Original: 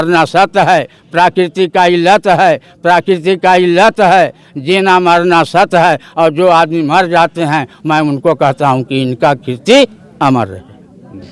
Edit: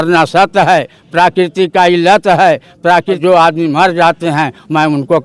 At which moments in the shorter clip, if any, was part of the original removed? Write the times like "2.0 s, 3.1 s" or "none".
3.2 s